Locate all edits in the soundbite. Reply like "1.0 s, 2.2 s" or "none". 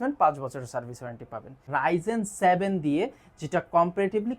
1.6 s